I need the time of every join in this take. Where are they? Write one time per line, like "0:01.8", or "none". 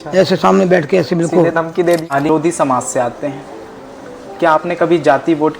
0:02.3